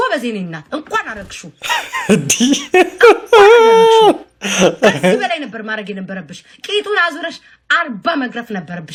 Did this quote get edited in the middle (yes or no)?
no